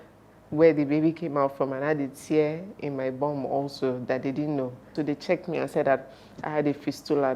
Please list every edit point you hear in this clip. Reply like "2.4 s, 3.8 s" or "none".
4.9 s